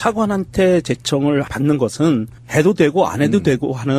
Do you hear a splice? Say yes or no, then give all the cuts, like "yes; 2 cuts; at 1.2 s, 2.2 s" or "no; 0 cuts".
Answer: yes; 1 cut; at 2.8 s